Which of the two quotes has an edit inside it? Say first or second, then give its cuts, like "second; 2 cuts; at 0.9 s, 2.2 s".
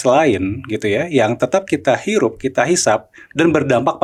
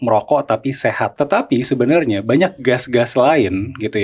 second; 1 cut; at 1.1 s